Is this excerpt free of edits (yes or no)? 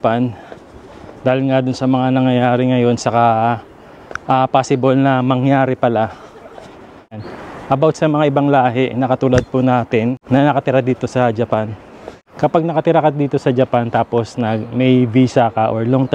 yes